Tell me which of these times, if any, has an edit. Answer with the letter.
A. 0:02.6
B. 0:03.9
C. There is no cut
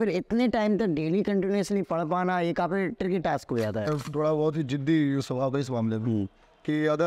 B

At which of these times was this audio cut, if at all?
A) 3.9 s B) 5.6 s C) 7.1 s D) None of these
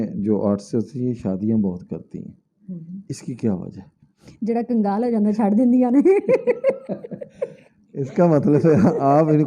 D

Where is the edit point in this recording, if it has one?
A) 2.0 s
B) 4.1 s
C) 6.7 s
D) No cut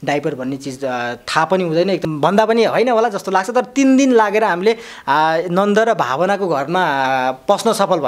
A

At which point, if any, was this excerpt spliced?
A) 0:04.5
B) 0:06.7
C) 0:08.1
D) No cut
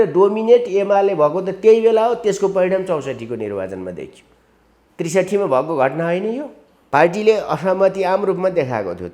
B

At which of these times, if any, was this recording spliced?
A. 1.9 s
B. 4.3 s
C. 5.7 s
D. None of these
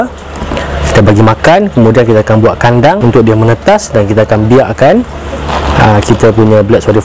D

